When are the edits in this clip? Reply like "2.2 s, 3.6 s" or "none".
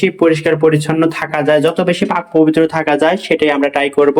none